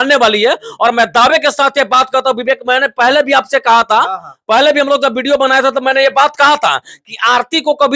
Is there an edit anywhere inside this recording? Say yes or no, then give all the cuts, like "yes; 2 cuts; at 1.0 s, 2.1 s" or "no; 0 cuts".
no; 0 cuts